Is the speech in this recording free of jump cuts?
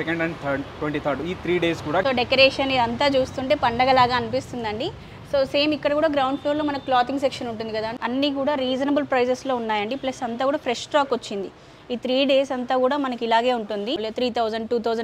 no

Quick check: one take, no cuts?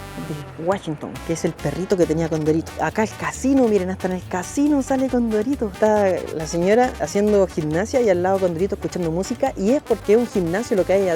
no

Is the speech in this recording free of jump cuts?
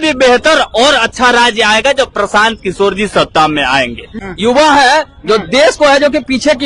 no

